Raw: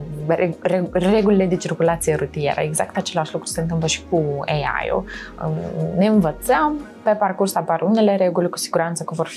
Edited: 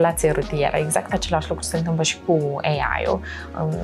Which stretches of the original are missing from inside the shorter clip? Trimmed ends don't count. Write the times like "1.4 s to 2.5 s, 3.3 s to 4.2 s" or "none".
none